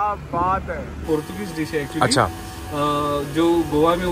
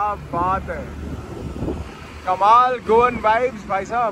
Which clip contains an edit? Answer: first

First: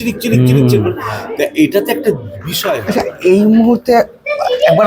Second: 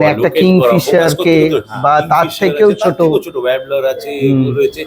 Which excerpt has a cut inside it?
first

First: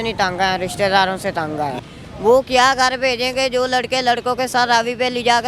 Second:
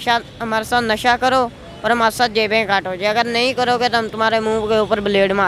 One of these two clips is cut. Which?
first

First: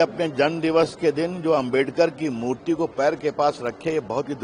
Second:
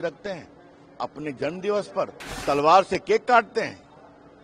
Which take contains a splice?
second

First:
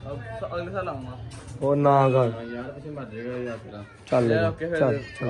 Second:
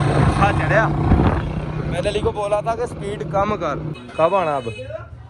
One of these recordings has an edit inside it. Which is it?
second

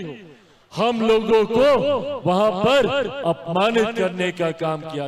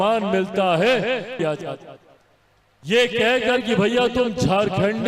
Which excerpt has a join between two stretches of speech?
second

